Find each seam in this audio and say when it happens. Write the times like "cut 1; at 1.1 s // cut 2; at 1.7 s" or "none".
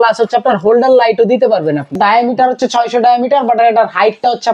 cut 1; at 2.0 s